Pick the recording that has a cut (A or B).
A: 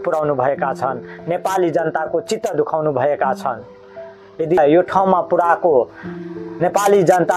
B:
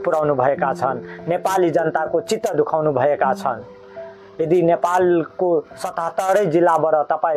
A